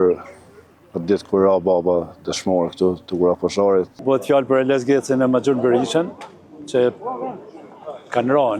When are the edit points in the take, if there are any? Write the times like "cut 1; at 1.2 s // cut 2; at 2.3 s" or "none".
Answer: cut 1; at 3.9 s